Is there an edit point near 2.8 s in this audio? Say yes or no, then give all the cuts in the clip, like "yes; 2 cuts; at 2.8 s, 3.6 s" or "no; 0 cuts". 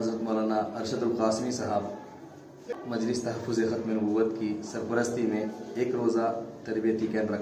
yes; 1 cut; at 2.8 s